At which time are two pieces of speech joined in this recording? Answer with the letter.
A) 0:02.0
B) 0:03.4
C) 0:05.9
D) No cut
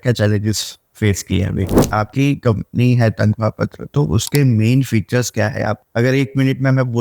A